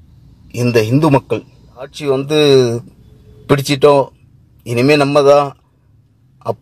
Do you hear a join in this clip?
yes; 1 cut; at 2.0 s

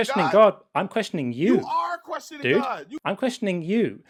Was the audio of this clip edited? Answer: no; 0 cuts

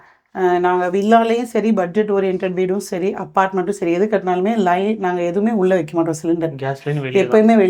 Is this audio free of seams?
yes; 0 cuts

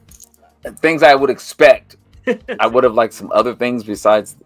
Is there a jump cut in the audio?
yes; 1 cut; at 2.4 s

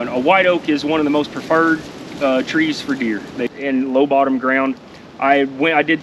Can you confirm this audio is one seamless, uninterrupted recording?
no; 1 cut; at 3.4 s

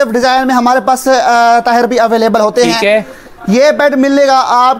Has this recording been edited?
no; 0 cuts

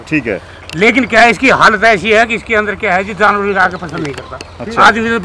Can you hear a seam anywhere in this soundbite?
no; 0 cuts

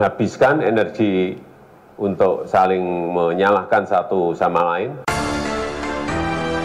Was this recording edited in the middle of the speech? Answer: yes; 1 cut; at 5.0 s

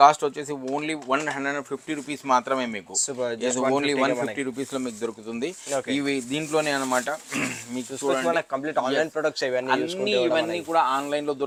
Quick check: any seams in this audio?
no; 0 cuts

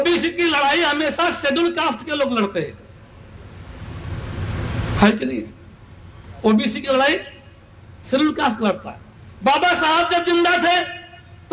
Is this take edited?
no; 0 cuts

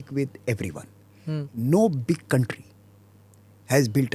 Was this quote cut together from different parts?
no; 0 cuts

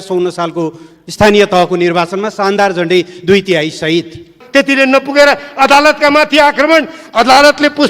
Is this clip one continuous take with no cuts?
no; 1 cut; at 4.4 s

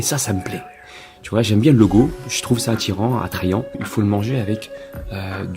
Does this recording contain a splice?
yes; 1 cut; at 3.8 s

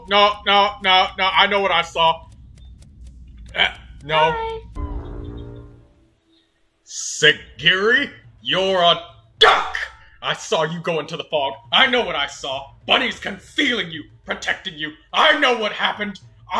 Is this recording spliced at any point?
yes; 1 cut; at 4.7 s

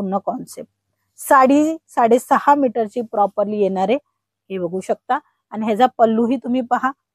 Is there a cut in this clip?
no; 0 cuts

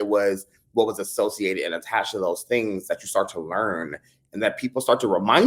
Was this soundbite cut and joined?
no; 0 cuts

